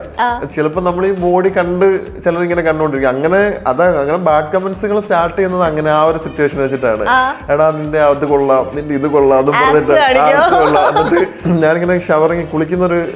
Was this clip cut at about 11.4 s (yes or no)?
yes